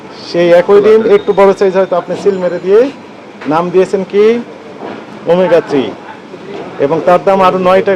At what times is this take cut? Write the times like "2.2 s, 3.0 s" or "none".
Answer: none